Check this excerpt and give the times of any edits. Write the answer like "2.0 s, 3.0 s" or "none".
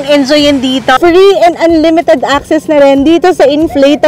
1.0 s